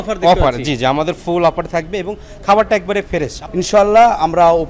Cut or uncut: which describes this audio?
cut